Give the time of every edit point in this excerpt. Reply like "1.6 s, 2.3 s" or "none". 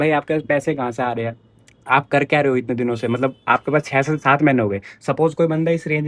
none